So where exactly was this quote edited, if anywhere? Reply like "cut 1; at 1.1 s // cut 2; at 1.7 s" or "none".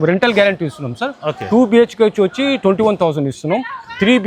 none